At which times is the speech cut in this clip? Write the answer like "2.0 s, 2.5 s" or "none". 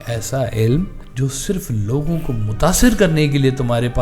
1.0 s